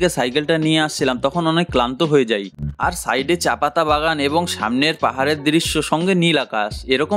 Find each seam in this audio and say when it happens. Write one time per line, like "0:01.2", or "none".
0:02.5